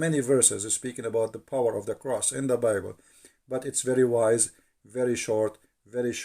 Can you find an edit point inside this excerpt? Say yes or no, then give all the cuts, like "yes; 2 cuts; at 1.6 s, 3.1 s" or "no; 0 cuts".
no; 0 cuts